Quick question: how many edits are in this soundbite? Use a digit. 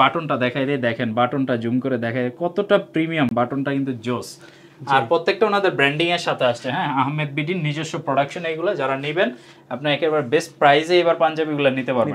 0